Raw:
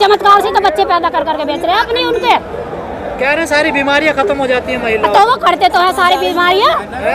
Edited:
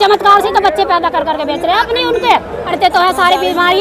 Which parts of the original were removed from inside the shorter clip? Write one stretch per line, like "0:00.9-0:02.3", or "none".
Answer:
0:02.7-0:05.5